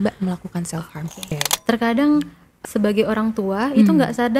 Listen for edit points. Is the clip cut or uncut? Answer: cut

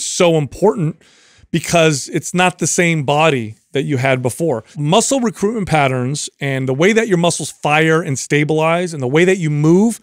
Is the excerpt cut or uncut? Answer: cut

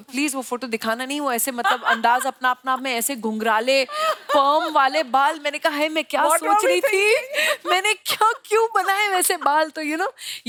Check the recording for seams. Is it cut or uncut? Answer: uncut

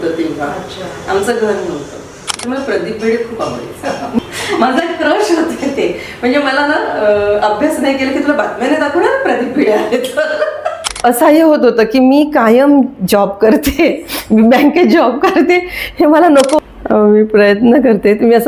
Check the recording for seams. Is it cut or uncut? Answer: cut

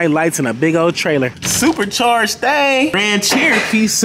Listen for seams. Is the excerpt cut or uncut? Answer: cut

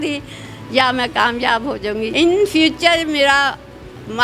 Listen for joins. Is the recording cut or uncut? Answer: cut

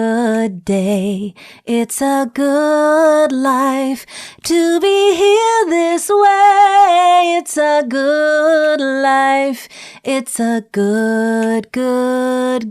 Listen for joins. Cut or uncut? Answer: uncut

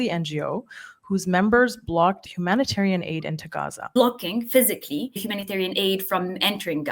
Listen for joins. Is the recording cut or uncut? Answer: cut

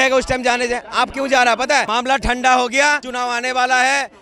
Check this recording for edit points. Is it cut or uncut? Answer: cut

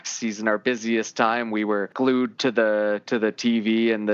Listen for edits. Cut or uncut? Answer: cut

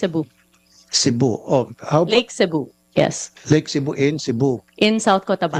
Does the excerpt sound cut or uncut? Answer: uncut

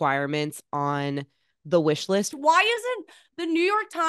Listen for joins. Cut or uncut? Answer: cut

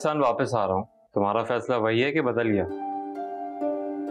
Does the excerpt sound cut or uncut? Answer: cut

